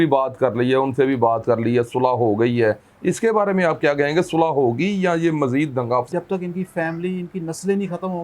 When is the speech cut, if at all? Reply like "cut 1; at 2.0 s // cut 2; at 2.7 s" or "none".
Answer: cut 1; at 6.1 s